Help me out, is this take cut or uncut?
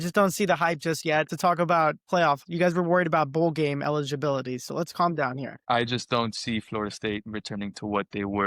cut